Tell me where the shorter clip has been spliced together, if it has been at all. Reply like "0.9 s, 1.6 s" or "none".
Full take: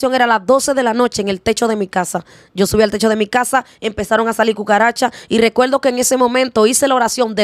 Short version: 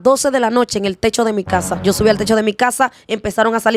1.7 s

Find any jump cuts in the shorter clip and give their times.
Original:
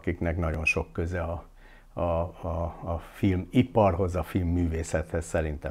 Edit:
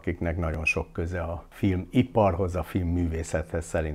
1.5 s

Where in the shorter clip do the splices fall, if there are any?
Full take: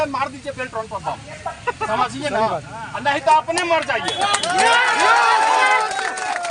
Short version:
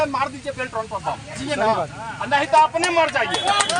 1.4 s

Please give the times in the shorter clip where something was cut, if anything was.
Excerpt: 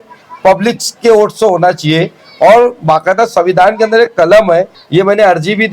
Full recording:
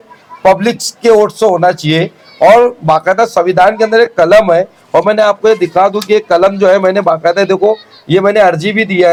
4.8 s

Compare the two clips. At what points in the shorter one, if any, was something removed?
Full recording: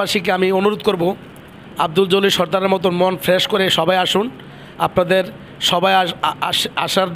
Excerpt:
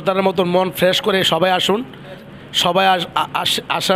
2.2 s

